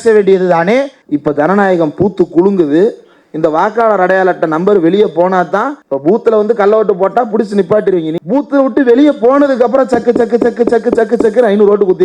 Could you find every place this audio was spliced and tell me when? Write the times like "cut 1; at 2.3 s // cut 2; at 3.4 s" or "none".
cut 1; at 1.0 s // cut 2; at 5.8 s // cut 3; at 8.1 s